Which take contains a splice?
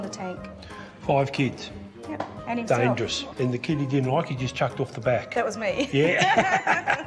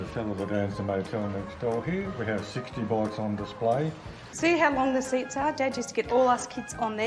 second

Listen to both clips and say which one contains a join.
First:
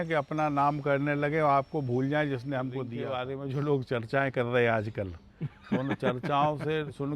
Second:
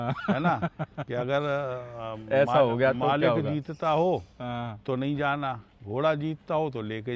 first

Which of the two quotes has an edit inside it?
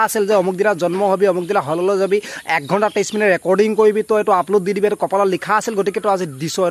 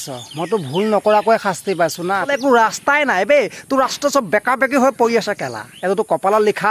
second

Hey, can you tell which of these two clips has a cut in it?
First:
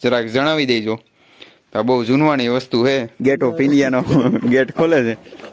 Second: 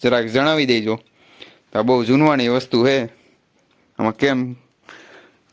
first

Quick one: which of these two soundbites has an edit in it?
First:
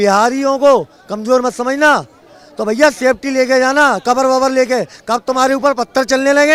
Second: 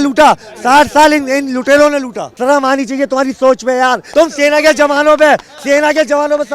second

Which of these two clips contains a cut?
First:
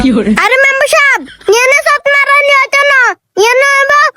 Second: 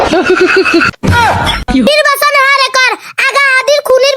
second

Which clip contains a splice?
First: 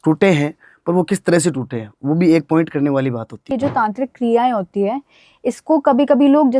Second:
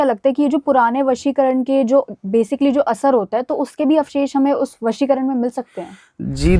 first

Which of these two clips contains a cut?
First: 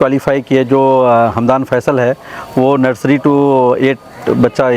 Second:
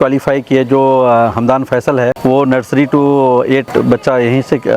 second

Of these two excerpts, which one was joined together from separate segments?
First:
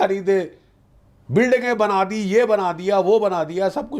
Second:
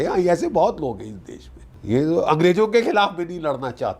second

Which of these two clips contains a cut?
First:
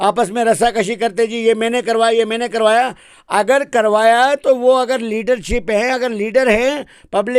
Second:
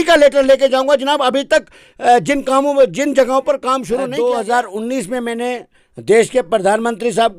second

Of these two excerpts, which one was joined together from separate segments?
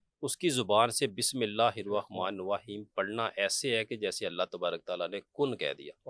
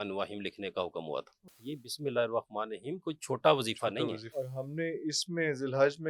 second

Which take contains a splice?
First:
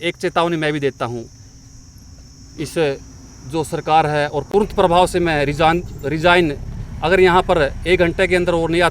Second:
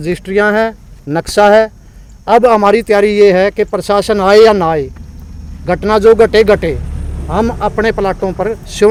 first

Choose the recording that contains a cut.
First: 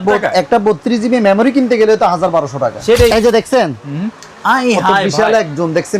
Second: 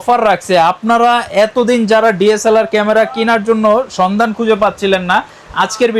first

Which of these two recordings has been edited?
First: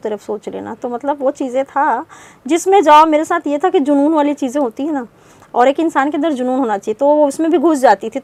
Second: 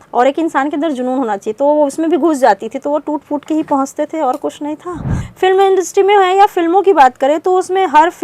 second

